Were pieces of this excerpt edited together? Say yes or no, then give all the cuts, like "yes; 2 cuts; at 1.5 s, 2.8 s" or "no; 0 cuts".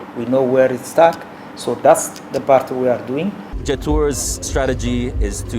yes; 1 cut; at 3.5 s